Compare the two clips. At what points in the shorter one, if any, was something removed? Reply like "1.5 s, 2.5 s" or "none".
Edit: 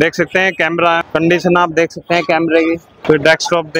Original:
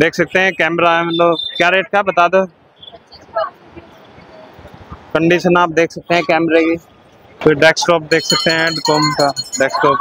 1.0 s, 2.9 s